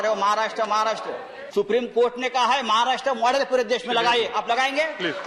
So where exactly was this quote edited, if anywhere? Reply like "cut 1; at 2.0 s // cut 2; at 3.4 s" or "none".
cut 1; at 1.2 s

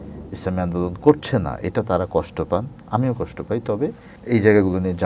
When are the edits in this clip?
cut 1; at 4.1 s

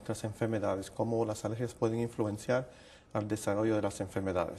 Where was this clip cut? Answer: cut 1; at 3.2 s

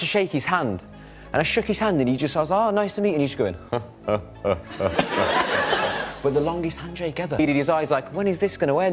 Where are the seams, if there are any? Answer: cut 1; at 7.4 s

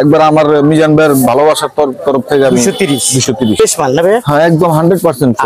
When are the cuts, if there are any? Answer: cut 1; at 4.0 s

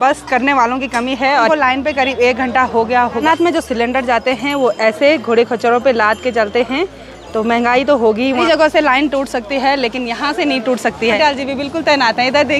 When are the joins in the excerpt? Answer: cut 1; at 1.5 s // cut 2; at 3.2 s // cut 3; at 8.4 s // cut 4; at 11.2 s

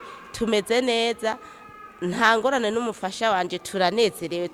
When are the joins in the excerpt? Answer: none

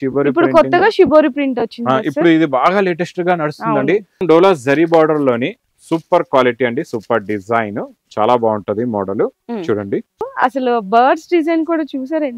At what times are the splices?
cut 1; at 4.2 s // cut 2; at 10.3 s

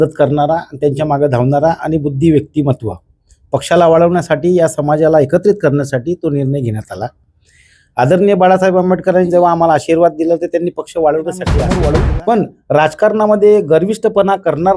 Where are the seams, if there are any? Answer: cut 1; at 11.5 s

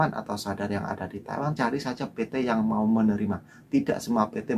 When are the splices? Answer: cut 1; at 1.6 s

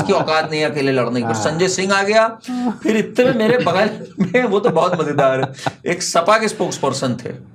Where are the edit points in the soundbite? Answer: none

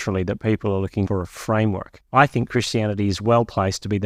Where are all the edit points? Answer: cut 1; at 1.1 s // cut 2; at 1.9 s

